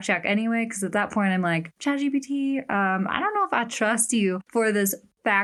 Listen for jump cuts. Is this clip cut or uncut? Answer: uncut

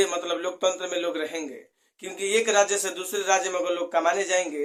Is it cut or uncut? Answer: uncut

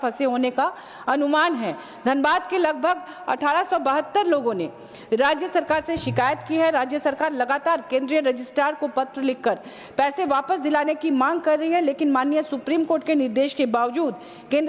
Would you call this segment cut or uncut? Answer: uncut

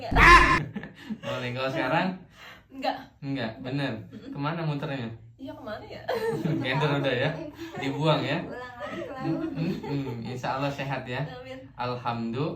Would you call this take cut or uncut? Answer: uncut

